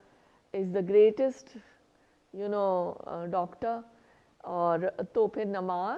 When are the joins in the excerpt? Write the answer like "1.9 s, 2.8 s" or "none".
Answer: none